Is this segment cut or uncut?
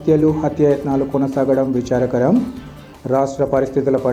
uncut